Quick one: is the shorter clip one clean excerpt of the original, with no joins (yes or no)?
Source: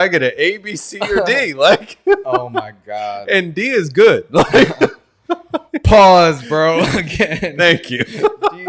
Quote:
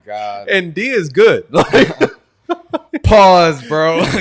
yes